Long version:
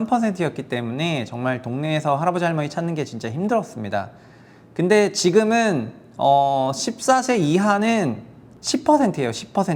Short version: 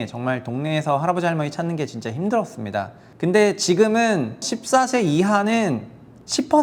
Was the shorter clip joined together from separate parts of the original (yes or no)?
yes